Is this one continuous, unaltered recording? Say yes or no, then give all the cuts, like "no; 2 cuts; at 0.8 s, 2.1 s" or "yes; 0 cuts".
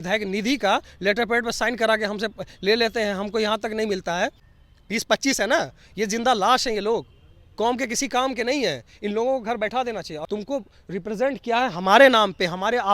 no; 2 cuts; at 4.5 s, 10.2 s